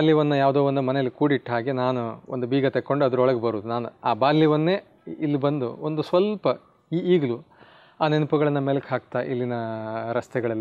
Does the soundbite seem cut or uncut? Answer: uncut